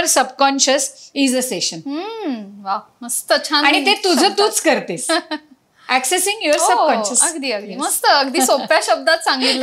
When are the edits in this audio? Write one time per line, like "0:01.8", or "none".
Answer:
none